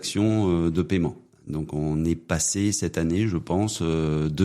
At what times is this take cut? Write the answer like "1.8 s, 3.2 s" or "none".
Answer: 1.3 s